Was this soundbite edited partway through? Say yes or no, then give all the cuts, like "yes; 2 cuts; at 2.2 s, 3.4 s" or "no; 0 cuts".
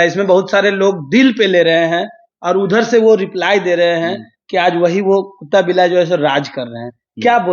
no; 0 cuts